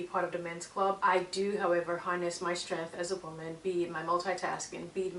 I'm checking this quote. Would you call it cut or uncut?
cut